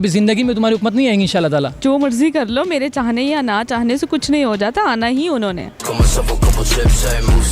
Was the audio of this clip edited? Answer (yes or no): yes